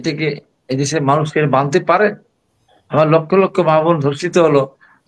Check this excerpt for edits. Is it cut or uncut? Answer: uncut